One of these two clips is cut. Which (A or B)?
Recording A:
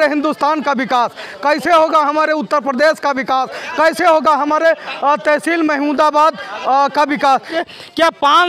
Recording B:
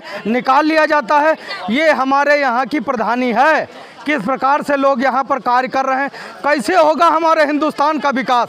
A